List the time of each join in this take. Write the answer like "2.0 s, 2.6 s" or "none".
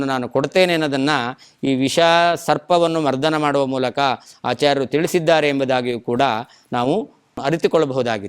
7.4 s